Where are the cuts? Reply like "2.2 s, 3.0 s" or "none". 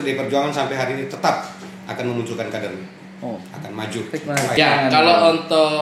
4.5 s